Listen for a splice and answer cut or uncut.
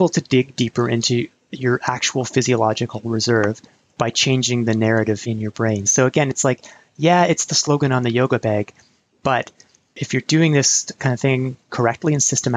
cut